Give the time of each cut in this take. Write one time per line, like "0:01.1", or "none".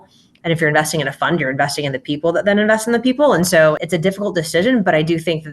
0:03.8